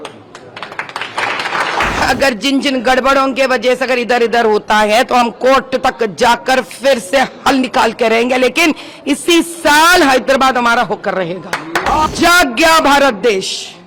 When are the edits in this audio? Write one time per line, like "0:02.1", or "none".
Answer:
0:02.0
0:12.1